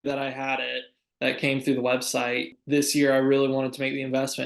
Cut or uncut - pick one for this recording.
cut